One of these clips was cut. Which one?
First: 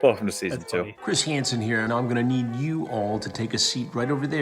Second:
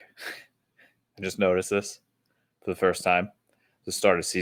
first; 1 cut; at 1.0 s

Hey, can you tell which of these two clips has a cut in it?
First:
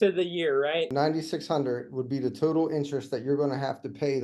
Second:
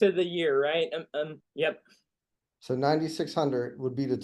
first; 1 cut; at 0.9 s

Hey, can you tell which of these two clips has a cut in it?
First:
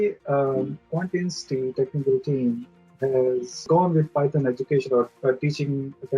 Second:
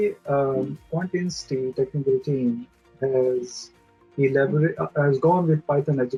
first; 1 cut; at 3.7 s

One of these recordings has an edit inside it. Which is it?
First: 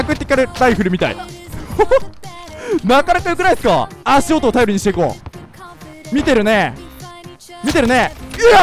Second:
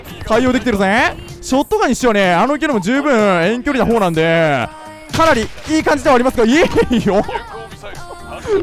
first; 1 cut; at 3.9 s

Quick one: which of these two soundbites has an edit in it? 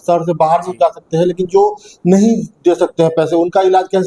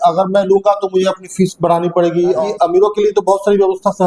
second; 1 cut; at 2.4 s

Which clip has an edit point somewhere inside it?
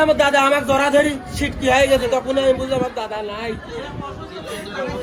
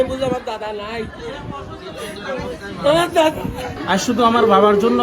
second; 1 cut; at 3.7 s

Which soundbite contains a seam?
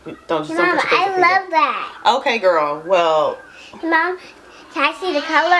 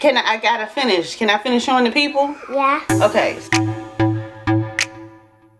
second; 1 cut; at 3.4 s

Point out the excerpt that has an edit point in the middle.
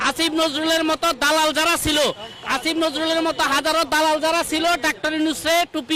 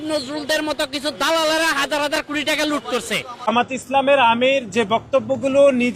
second; 1 cut; at 3.5 s

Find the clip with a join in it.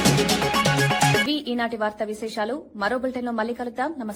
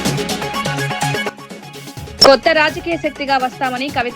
second; 1 cut; at 1.2 s

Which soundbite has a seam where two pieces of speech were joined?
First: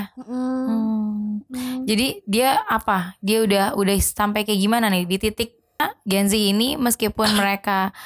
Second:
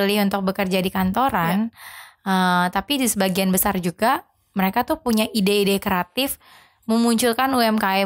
first; 1 cut; at 5.8 s

